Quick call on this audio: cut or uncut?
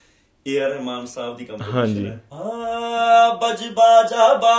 cut